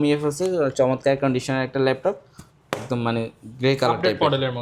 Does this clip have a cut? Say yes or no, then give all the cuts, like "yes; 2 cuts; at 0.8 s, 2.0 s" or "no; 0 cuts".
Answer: no; 0 cuts